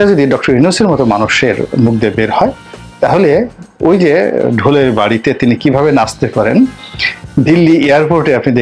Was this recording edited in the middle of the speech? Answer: no; 0 cuts

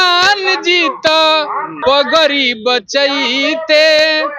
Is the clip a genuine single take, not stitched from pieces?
no; 1 cut; at 1.7 s

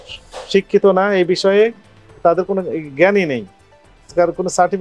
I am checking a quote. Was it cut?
no; 0 cuts

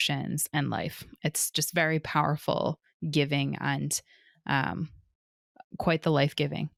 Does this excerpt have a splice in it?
no; 0 cuts

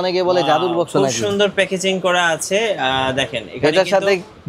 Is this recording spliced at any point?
no; 0 cuts

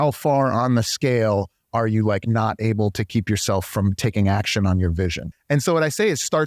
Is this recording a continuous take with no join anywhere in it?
no; 1 cut; at 5.2 s

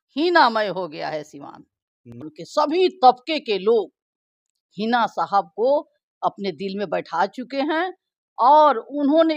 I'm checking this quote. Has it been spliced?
yes; 1 cut; at 2.3 s

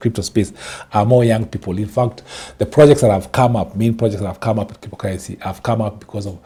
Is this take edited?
no; 0 cuts

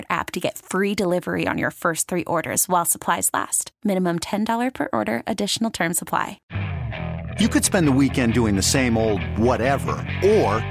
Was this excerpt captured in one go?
no; 1 cut; at 6.4 s

